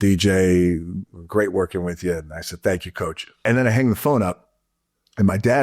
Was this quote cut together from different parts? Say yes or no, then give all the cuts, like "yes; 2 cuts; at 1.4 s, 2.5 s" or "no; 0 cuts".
yes; 1 cut; at 3.4 s